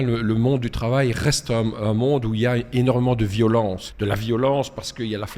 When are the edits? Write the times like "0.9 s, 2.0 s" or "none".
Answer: 3.9 s